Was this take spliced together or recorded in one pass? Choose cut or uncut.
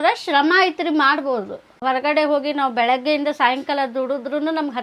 cut